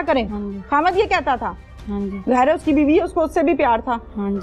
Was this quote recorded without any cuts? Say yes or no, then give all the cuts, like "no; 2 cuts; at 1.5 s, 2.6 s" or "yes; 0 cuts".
yes; 0 cuts